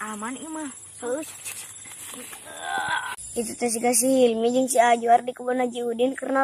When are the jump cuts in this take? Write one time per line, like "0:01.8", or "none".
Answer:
0:03.2